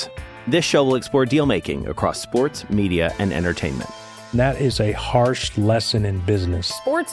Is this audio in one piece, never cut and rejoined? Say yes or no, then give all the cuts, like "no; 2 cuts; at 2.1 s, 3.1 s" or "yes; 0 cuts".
yes; 0 cuts